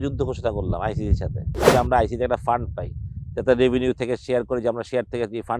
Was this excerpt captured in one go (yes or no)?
no